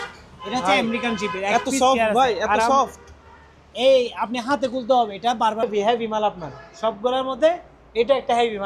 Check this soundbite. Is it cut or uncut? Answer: cut